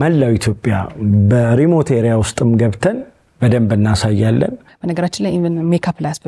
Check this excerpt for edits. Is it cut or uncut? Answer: cut